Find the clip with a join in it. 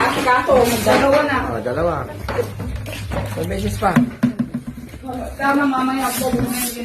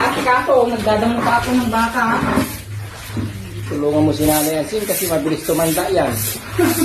first; 1 cut; at 0.9 s

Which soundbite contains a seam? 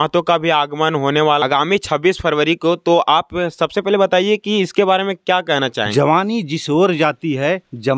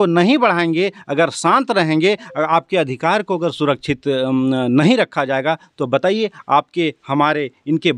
first; 2 cuts; at 1.4 s, 5.9 s

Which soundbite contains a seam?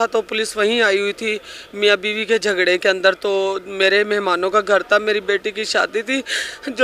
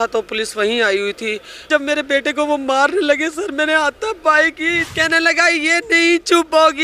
second; 2 cuts; at 1.6 s, 4.9 s

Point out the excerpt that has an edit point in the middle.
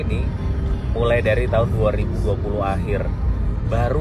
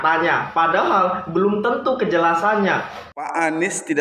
second; 1 cut; at 2.9 s

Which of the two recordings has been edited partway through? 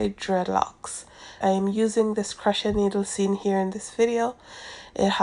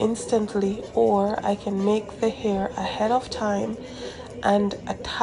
first; 1 cut; at 1.4 s

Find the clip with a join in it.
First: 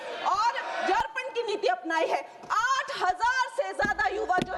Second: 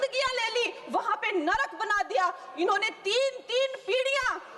first; 1 cut; at 1.0 s

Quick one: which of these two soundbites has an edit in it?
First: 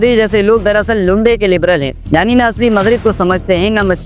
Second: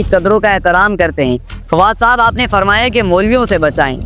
second; 1 cut; at 1.5 s

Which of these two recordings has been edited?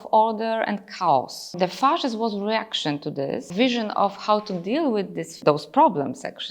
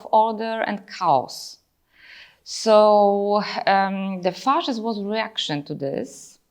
first; 3 cuts; at 1.5 s, 3.5 s, 5.3 s

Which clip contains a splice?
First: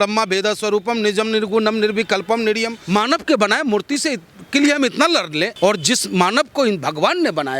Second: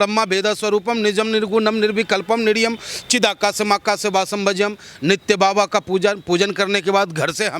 first; 2 cuts; at 2.7 s, 5.5 s

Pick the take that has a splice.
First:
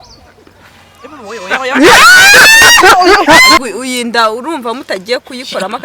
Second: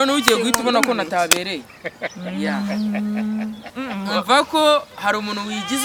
first; 1 cut; at 3.6 s

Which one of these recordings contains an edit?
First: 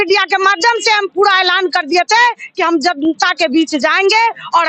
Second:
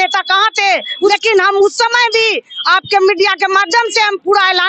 second; 1 cut; at 1.1 s

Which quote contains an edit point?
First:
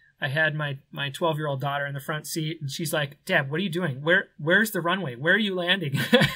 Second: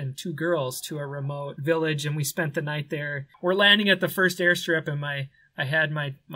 second; 2 cuts; at 1.5 s, 3.2 s

